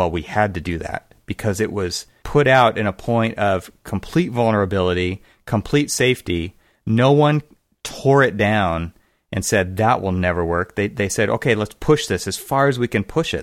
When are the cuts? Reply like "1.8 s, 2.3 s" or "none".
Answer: 2.2 s